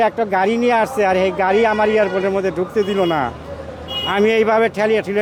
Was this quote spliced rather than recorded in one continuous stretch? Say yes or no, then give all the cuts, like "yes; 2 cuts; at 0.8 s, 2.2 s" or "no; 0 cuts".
no; 0 cuts